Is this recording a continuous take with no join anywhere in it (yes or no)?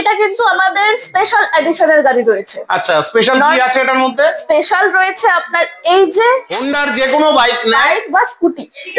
no